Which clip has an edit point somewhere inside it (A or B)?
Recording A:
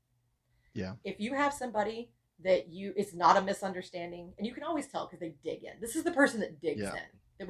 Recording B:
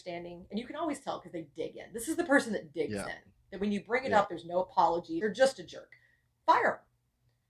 B